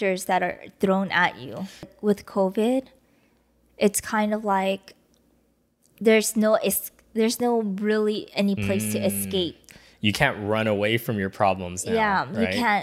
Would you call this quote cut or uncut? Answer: cut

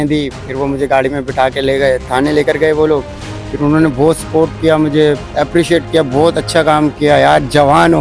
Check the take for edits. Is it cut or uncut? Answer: uncut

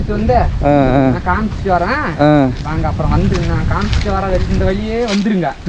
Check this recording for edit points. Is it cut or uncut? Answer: uncut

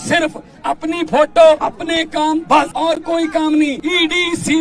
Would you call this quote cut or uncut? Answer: cut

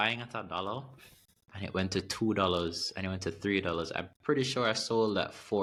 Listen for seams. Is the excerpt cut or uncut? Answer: uncut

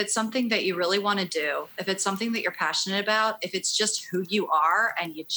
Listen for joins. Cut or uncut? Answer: uncut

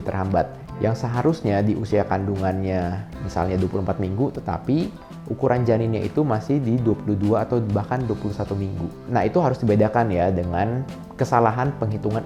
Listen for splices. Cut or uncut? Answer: uncut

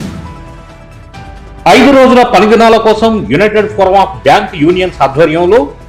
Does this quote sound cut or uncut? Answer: uncut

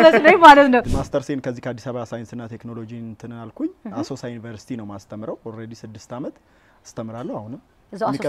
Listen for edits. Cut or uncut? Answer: cut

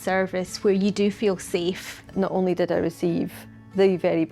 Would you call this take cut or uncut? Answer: cut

